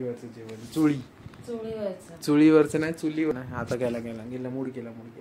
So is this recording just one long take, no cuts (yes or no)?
no